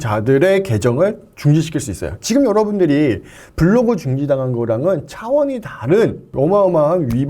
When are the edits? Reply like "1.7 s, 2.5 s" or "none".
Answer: 6.2 s